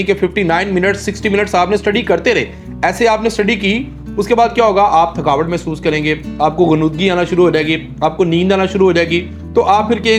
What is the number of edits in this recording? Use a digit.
0